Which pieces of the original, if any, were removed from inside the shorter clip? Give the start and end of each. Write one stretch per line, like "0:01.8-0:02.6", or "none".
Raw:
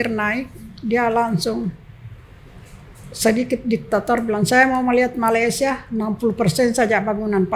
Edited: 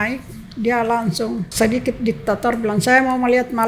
0:01.8-0:03.1